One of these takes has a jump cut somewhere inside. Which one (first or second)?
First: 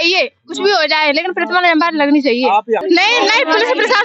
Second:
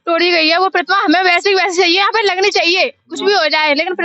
first